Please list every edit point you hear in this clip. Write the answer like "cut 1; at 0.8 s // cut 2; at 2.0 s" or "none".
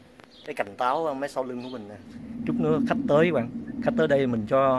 none